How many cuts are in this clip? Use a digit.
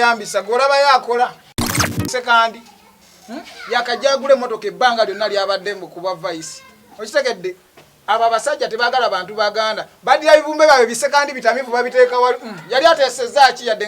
1